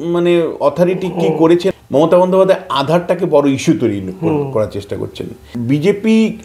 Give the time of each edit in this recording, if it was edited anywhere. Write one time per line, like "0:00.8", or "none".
0:01.7
0:05.5